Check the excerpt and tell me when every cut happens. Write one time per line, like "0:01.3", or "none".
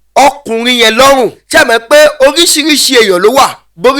0:01.4